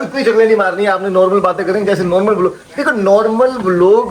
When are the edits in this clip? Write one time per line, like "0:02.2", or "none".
none